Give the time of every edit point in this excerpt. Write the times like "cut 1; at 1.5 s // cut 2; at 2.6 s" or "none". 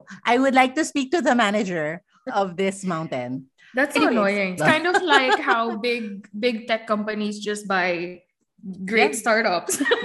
cut 1; at 2.2 s // cut 2; at 4.6 s